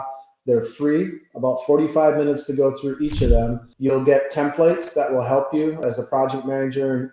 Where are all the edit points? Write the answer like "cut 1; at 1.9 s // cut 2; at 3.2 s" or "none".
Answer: cut 1; at 3.6 s // cut 2; at 5.8 s